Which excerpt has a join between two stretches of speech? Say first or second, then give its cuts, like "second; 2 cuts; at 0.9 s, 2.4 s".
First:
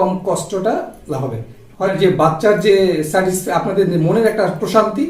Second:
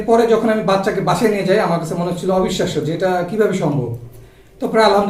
first; 1 cut; at 1.9 s